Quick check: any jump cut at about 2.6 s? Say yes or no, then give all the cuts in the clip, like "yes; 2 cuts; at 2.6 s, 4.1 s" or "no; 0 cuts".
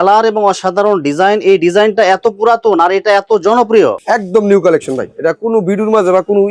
no; 1 cut; at 4.0 s